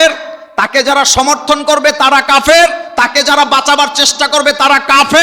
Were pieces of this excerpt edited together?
no; 0 cuts

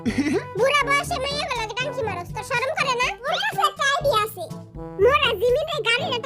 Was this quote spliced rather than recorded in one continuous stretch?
yes; 1 cut; at 3.3 s

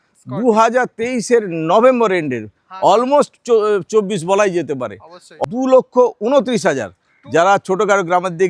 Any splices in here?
yes; 1 cut; at 5.2 s

